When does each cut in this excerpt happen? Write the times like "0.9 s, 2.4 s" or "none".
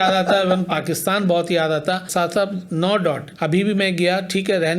2.1 s, 3.3 s